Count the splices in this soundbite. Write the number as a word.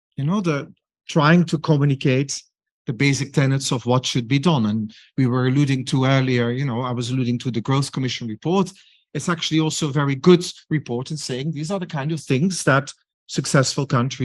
zero